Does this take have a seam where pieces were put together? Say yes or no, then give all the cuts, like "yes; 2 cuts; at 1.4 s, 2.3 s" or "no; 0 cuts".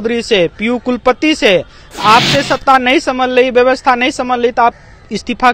no; 0 cuts